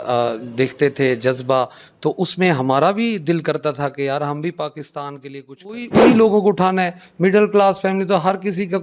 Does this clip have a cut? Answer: yes; 1 cut; at 5.9 s

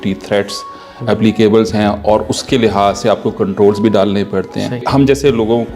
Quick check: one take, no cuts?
no; 1 cut; at 4.8 s

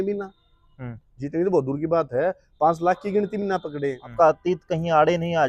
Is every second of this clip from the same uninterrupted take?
no; 1 cut; at 4.1 s

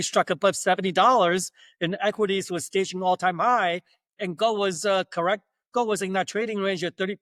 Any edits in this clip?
no; 0 cuts

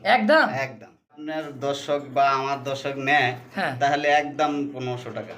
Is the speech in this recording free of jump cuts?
no; 1 cut; at 1.3 s

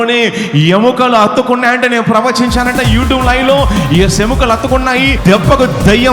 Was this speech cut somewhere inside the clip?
yes; 1 cut; at 5.2 s

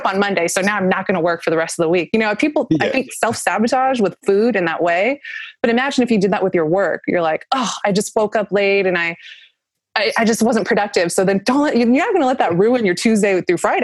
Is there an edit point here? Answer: no; 0 cuts

